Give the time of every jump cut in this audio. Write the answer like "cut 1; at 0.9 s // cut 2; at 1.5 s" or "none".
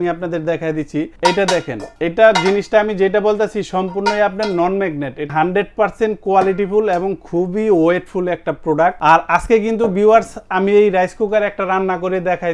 cut 1; at 1.1 s // cut 2; at 1.8 s // cut 3; at 5.3 s // cut 4; at 9.0 s